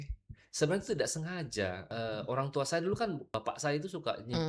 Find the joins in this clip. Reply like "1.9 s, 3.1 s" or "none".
1.9 s, 3.2 s